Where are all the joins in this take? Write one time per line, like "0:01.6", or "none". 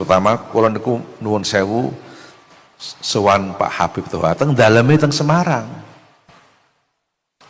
none

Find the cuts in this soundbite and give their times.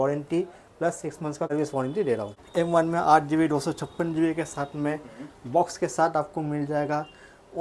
0:01.5
0:02.4

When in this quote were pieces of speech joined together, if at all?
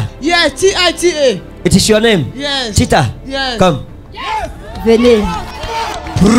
none

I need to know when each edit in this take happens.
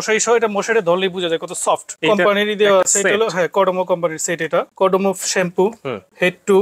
0:01.9
0:04.7

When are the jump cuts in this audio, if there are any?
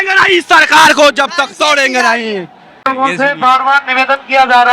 0:02.8

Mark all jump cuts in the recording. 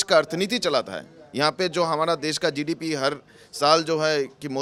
none

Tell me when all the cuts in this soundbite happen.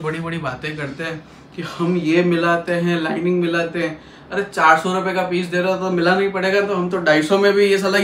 none

